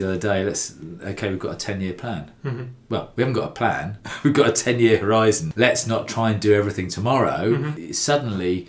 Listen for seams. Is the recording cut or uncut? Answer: cut